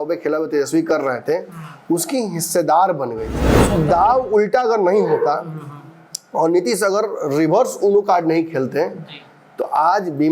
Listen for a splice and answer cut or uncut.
cut